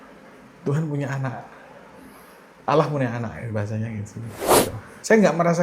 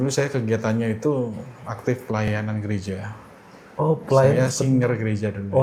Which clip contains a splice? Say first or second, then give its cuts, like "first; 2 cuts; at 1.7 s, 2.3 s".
first; 1 cut; at 4.6 s